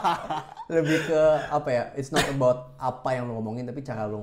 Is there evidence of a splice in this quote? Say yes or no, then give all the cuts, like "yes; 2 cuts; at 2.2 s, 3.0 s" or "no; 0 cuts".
no; 0 cuts